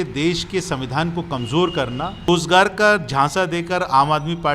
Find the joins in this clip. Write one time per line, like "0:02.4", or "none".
0:02.3